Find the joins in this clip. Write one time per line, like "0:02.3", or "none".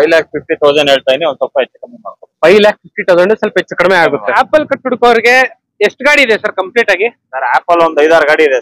0:04.3